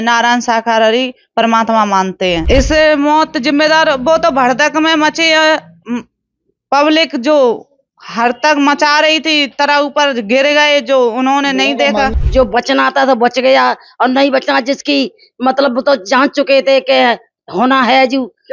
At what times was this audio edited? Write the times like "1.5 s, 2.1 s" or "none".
2.4 s, 12.1 s